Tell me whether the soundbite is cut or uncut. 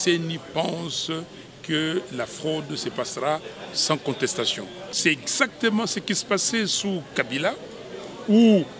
cut